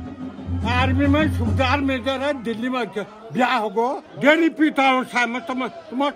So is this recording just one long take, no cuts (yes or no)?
no